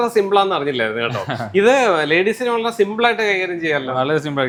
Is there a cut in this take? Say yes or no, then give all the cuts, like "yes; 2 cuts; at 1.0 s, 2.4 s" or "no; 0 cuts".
no; 0 cuts